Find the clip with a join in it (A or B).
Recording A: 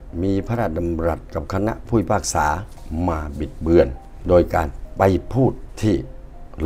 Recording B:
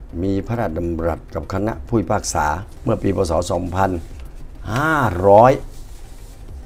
A